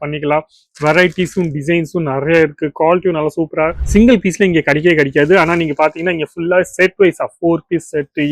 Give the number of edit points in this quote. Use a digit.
1